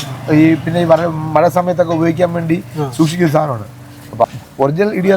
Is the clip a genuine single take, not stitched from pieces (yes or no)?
no